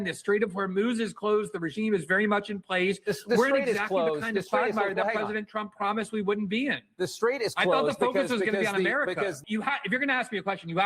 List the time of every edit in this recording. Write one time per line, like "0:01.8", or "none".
0:09.4